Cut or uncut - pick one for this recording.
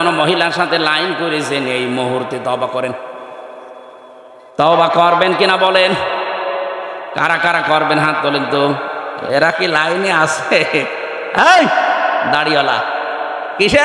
cut